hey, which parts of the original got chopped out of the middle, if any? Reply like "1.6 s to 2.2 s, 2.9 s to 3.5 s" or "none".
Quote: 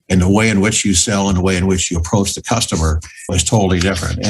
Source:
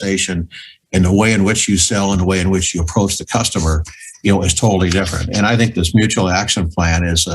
4.1 s to 4.4 s